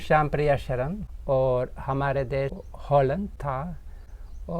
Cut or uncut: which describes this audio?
cut